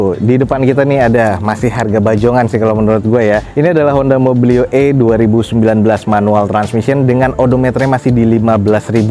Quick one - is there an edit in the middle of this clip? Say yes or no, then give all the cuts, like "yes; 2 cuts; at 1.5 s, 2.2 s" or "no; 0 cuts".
no; 0 cuts